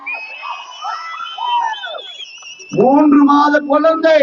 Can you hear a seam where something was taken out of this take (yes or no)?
no